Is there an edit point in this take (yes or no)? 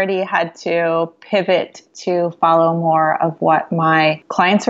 no